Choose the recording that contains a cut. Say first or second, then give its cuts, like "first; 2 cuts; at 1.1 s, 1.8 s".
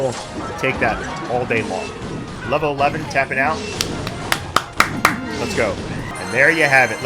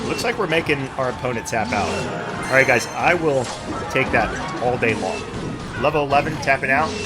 second; 1 cut; at 2.4 s